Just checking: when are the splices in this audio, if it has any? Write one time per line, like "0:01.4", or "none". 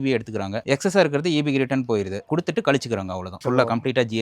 0:03.3